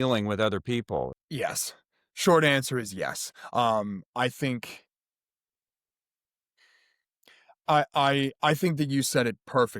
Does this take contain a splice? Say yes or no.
yes